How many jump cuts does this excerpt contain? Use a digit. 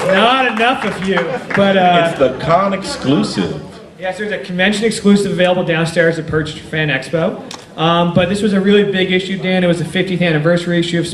1